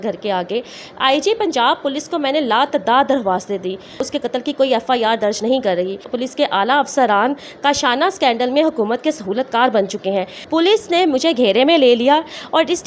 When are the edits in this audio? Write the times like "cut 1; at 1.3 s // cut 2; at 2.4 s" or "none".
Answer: cut 1; at 4.0 s // cut 2; at 6.1 s // cut 3; at 10.4 s